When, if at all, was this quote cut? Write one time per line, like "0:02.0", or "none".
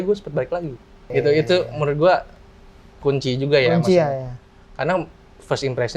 0:01.0